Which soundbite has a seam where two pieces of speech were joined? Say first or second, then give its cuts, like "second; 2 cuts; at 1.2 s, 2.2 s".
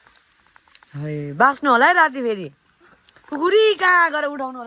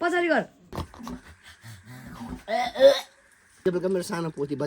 second; 2 cuts; at 0.7 s, 3.6 s